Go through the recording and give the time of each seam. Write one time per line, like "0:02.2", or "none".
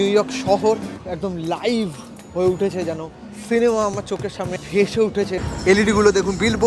0:01.0
0:04.6
0:05.4